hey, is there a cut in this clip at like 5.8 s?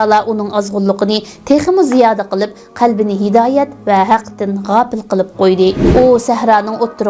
yes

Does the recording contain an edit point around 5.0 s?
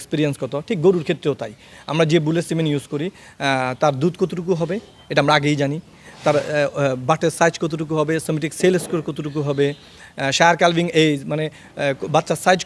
no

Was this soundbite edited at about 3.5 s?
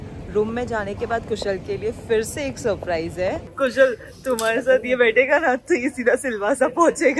yes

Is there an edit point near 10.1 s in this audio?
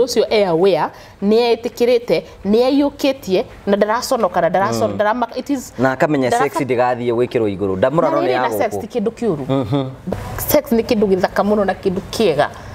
yes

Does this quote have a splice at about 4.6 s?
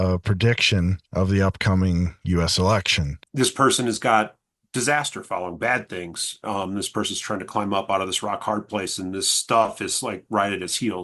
no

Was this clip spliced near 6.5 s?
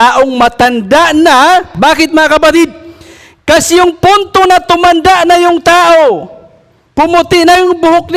no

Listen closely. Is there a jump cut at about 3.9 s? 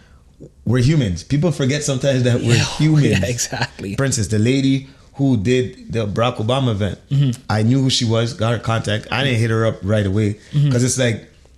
yes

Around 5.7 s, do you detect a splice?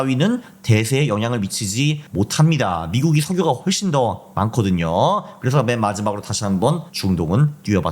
no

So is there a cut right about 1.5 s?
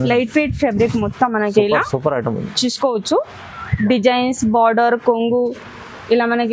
no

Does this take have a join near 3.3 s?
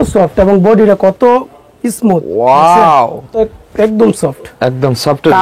yes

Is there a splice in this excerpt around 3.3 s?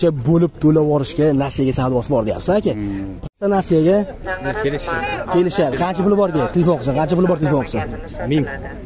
yes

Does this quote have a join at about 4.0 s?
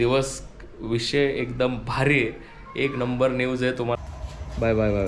yes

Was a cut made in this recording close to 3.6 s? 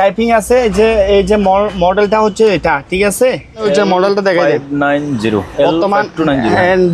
yes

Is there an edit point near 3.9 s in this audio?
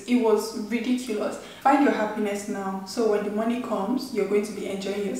no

